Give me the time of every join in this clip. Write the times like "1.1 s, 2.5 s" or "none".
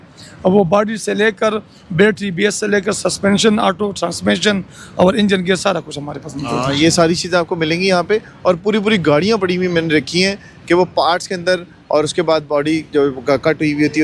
none